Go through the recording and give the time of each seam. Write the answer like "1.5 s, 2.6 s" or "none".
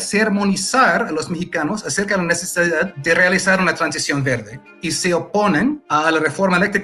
3.0 s, 5.8 s